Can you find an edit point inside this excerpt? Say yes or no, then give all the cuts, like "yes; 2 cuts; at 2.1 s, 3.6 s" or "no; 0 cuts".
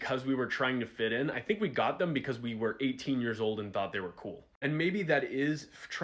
yes; 1 cut; at 5.1 s